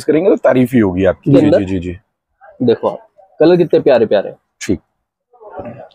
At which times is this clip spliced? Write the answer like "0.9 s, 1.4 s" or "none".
1.4 s